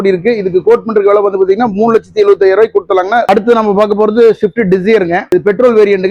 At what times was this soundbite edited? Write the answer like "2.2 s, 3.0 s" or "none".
3.3 s, 5.3 s